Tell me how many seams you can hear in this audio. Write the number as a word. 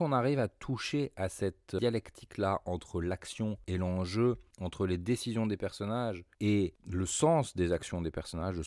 one